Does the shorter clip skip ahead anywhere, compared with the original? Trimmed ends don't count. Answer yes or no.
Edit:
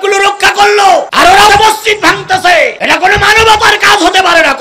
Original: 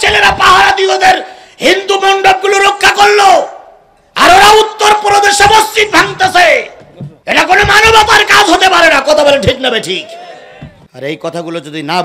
yes